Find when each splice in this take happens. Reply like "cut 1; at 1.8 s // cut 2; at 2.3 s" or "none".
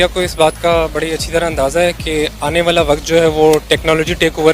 none